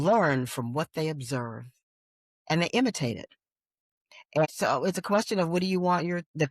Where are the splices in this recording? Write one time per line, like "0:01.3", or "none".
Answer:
0:04.1